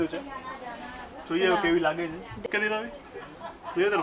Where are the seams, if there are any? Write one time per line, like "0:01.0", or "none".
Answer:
0:02.5